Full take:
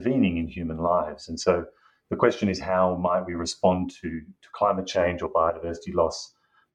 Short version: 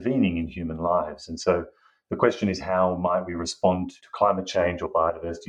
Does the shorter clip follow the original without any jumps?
no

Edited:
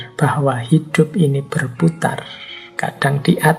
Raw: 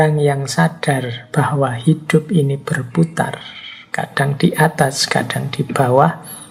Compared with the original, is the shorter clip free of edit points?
yes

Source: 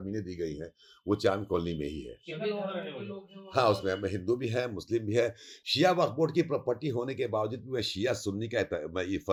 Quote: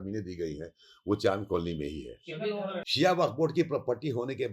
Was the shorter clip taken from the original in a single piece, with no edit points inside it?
no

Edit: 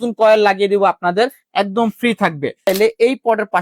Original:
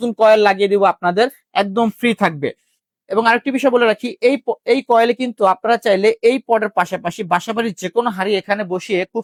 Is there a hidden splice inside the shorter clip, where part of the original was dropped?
yes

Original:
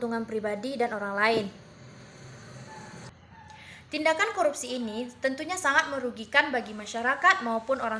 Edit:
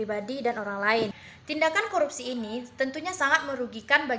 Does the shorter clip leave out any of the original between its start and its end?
yes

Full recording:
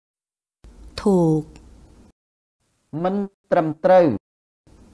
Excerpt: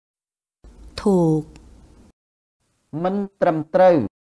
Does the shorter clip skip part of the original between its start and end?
yes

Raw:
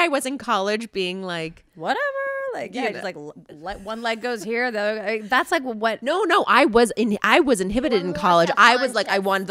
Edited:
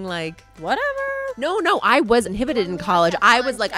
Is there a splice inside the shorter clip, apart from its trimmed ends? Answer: yes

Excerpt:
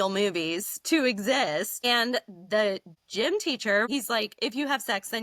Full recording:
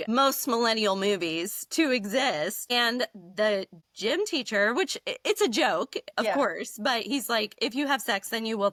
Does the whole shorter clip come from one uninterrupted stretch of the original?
no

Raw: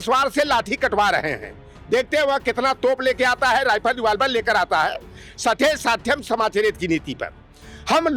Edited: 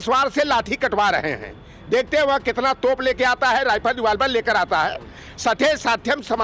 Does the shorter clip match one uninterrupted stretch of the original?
yes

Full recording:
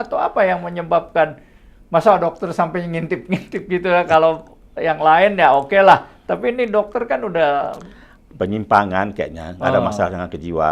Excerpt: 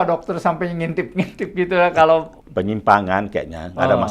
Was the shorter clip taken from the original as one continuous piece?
no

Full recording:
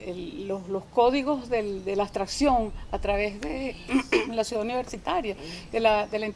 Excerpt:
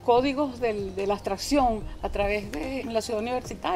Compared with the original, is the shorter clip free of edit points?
no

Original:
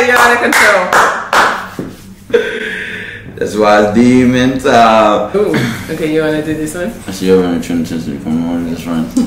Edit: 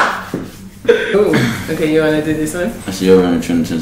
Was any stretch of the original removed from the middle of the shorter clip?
yes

